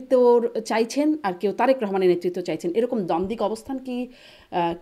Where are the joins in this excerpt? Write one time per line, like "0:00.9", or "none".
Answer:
none

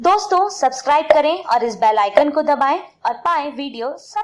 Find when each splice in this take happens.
none

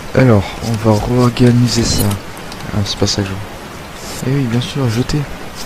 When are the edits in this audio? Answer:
0:02.5

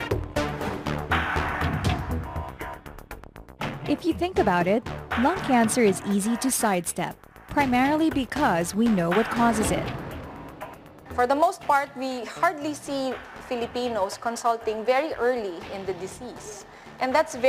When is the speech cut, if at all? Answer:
0:06.7

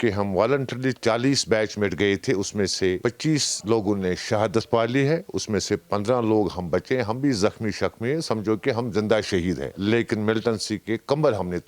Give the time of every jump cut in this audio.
none

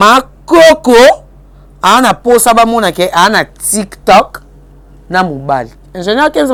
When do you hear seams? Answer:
none

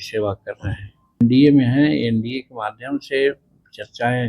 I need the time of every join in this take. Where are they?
0:01.2

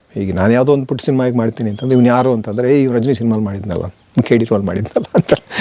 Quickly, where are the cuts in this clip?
none

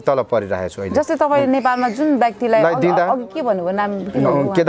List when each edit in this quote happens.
none

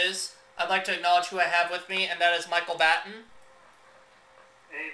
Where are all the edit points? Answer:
none

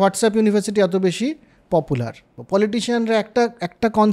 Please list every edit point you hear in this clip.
0:02.3

